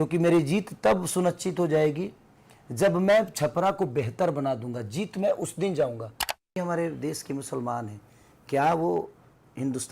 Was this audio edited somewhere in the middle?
yes; 1 cut; at 6.5 s

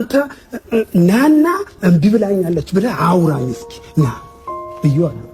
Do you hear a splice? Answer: no; 0 cuts

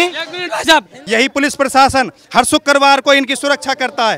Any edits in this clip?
yes; 1 cut; at 0.9 s

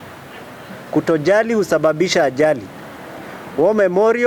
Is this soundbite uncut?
yes; 0 cuts

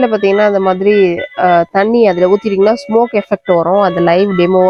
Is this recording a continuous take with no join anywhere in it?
yes; 0 cuts

